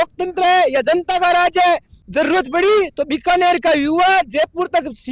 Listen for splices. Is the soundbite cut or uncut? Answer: cut